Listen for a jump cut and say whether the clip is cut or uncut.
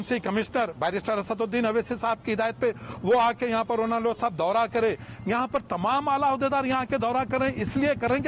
uncut